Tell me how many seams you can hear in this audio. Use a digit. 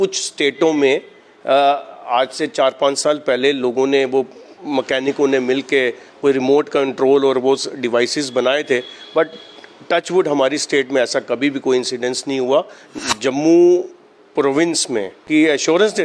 2